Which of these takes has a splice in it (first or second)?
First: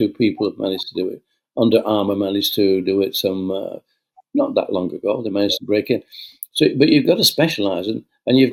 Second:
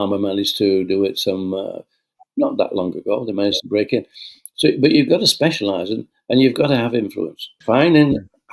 second